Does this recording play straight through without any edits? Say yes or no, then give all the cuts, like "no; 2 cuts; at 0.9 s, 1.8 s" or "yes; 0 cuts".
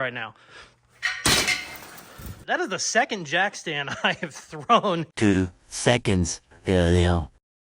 no; 1 cut; at 2.4 s